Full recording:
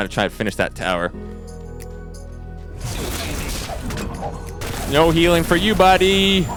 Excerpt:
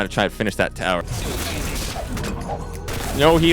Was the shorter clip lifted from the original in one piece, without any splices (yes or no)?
no